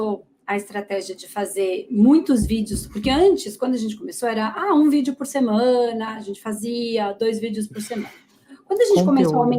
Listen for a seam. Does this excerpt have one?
no; 0 cuts

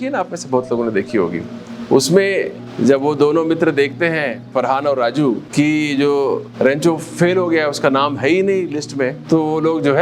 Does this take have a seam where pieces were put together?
yes; 5 cuts; at 2.6 s, 4.4 s, 5.4 s, 6.5 s, 9.2 s

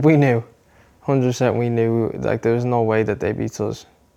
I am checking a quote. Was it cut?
no; 0 cuts

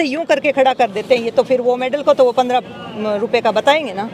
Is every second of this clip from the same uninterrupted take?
yes; 0 cuts

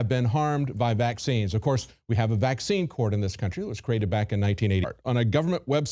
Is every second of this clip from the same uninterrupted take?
yes; 0 cuts

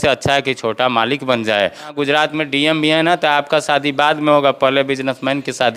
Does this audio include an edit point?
yes; 1 cut; at 1.9 s

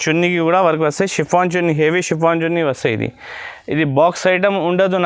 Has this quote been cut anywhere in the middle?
no; 0 cuts

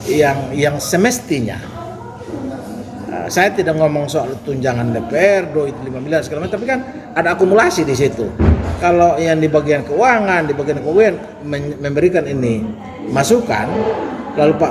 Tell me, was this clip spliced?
no; 0 cuts

